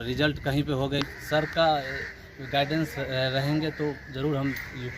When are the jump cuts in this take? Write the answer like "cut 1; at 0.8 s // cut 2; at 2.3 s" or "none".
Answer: cut 1; at 1.0 s